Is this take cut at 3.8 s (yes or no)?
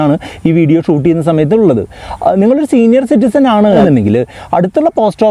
yes